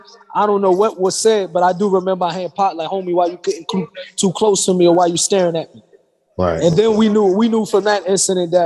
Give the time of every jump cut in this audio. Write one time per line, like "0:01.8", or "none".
none